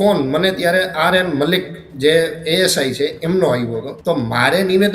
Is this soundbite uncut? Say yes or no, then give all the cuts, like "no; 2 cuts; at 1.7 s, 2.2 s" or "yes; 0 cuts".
no; 1 cut; at 3.9 s